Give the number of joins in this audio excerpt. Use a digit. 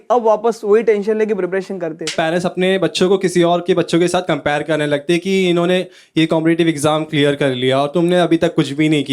1